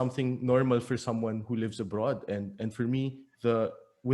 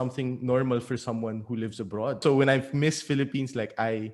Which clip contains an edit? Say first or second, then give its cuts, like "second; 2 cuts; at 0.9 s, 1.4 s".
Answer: second; 1 cut; at 2.2 s